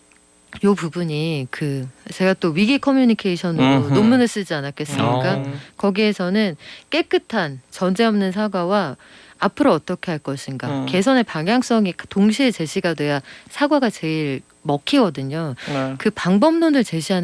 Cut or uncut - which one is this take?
uncut